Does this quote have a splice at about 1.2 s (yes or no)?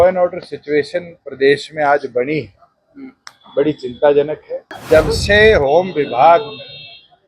no